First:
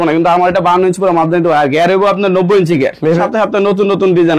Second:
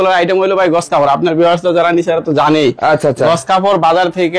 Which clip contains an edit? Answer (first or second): first